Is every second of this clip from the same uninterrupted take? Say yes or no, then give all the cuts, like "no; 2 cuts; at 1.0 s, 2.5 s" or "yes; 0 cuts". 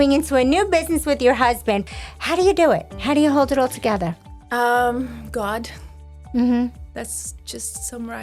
no; 1 cut; at 1.8 s